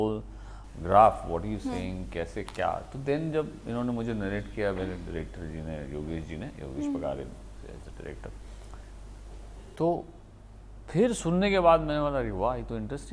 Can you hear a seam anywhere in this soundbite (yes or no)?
no